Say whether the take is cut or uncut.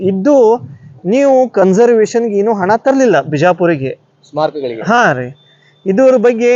uncut